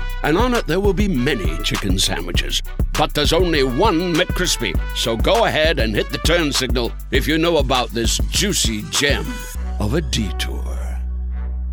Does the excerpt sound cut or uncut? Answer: uncut